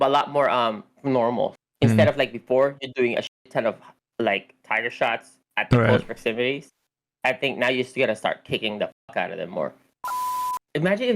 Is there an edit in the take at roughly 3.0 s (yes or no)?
no